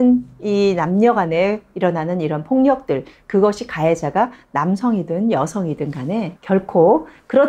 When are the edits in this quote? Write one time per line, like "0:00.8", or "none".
0:06.3